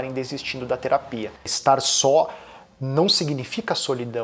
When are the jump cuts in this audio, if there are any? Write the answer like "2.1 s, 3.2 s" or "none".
1.5 s